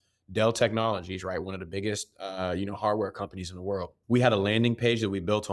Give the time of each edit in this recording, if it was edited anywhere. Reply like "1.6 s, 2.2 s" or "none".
3.9 s